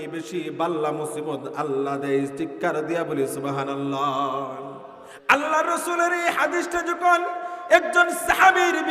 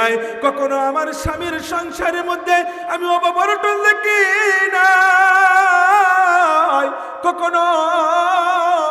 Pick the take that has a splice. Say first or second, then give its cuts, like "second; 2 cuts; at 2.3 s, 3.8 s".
first; 1 cut; at 5.1 s